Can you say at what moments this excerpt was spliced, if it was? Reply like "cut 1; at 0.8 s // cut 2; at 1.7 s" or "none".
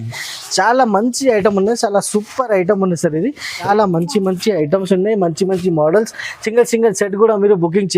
cut 1; at 3.7 s